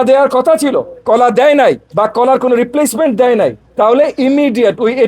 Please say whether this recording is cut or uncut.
cut